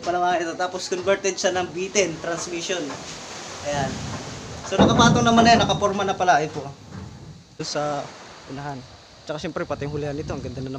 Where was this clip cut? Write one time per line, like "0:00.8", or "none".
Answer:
0:07.6